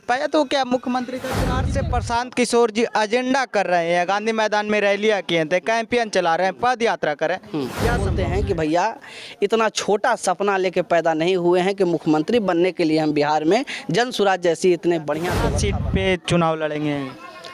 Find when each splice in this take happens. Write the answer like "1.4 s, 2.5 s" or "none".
1.7 s, 8.1 s, 15.5 s